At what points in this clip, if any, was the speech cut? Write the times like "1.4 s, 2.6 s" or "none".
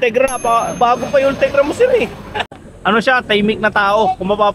2.6 s